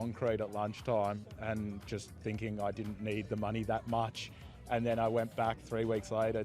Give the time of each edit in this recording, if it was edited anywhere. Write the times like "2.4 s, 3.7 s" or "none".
none

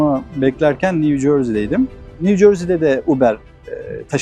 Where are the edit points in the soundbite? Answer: none

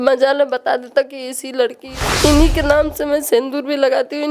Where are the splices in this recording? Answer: 1.8 s

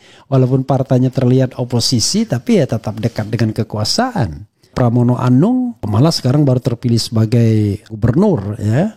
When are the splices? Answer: 4.7 s, 5.9 s, 7.9 s

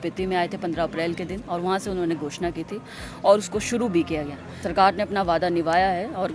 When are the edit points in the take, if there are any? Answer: 4.7 s

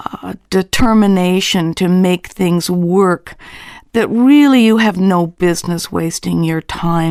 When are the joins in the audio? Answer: none

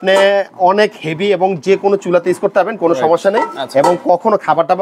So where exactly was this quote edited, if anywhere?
none

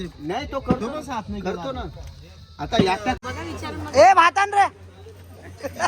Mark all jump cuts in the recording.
3.2 s

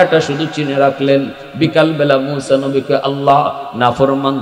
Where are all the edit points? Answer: none

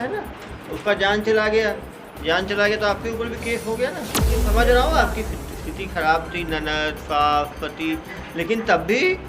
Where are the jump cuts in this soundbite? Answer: 4.3 s

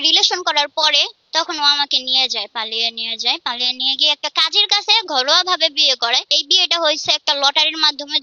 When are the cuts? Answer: 1.2 s, 6.4 s

